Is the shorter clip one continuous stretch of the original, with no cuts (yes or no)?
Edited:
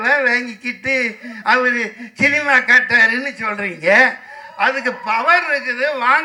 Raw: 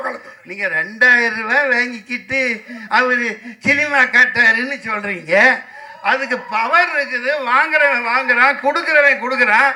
yes